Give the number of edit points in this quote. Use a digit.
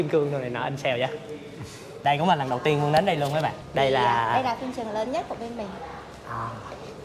2